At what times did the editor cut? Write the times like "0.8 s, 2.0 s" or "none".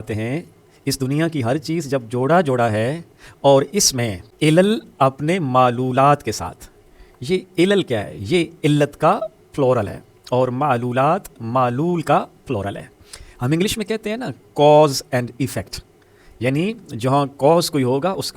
none